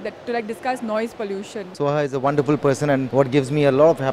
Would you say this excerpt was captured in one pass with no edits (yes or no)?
no